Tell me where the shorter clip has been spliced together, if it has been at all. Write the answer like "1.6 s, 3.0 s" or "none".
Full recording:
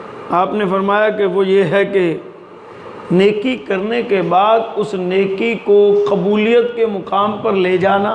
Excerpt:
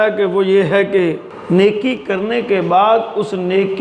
1.3 s